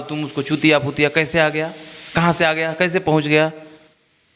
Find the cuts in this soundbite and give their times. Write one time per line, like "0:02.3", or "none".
none